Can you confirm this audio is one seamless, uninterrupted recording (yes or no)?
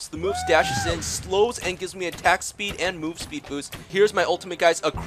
no